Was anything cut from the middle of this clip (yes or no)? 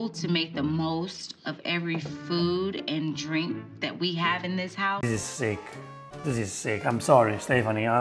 no